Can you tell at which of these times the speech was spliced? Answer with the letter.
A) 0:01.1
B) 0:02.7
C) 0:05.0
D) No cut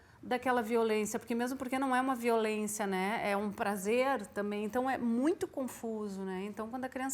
D